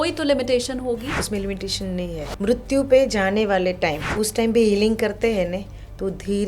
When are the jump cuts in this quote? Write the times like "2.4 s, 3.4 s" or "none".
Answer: 1.2 s, 2.3 s, 4.0 s